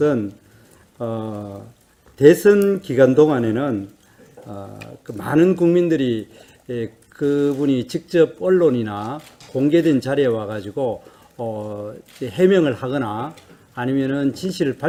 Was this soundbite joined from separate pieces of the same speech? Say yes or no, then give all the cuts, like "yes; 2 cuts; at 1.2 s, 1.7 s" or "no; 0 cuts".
no; 0 cuts